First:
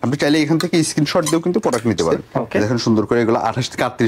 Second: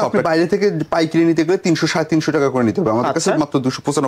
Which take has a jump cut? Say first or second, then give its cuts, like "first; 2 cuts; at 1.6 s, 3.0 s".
first; 1 cut; at 2.3 s